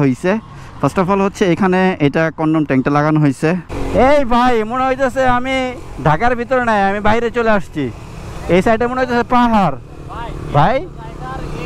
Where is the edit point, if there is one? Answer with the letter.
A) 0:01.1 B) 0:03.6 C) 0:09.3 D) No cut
B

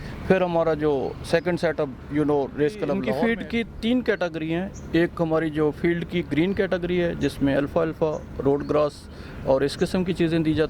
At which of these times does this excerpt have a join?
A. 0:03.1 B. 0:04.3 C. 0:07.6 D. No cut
A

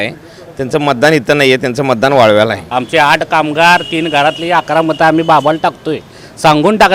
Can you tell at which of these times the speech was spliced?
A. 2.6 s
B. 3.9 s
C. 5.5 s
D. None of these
A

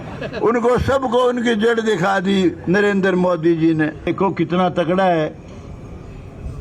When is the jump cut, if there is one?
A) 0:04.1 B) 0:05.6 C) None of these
A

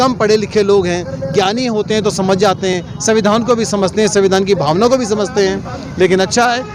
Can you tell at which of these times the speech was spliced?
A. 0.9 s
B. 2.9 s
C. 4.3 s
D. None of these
D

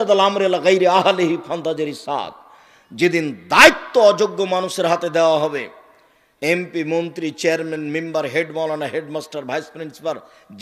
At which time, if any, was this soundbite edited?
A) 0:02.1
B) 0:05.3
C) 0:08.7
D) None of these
D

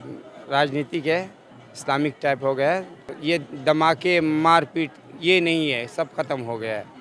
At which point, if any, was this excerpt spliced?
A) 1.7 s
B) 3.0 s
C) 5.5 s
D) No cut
B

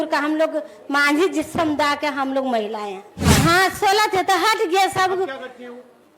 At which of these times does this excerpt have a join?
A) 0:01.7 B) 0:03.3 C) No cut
B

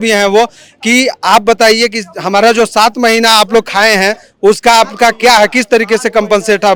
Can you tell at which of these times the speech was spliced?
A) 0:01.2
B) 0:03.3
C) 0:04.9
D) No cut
D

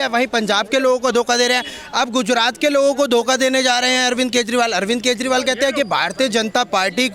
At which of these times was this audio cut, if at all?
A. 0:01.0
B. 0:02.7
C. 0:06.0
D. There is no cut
D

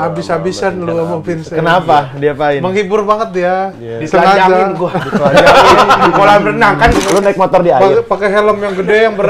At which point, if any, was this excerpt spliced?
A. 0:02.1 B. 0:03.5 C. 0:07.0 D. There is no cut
C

